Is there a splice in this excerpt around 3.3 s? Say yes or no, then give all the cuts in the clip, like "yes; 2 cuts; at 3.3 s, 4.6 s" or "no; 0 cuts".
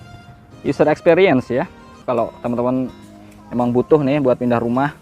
no; 1 cut; at 1.9 s